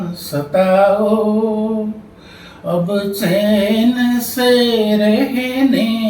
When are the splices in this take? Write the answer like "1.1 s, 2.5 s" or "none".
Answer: none